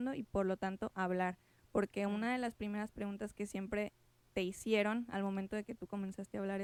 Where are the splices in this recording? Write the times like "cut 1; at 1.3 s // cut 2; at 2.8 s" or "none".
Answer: none